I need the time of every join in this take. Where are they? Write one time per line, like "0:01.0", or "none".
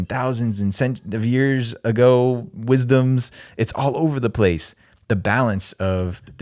none